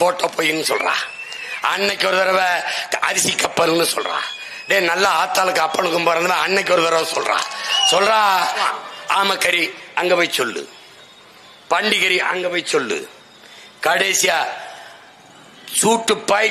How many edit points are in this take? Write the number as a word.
one